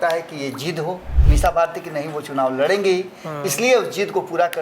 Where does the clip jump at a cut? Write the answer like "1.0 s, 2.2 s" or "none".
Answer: 1.1 s